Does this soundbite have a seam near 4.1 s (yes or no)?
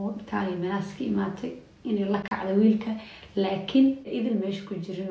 yes